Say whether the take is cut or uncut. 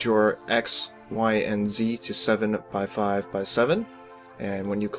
cut